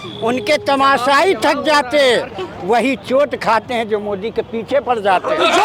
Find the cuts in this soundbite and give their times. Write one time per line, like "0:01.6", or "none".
none